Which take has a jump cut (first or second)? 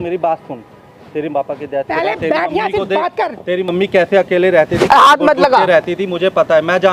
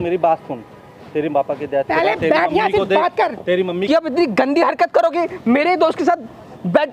second